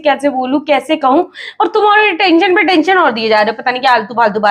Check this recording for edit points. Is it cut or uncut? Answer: uncut